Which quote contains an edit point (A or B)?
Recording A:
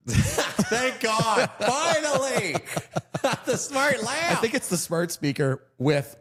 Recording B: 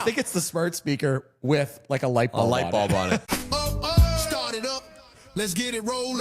B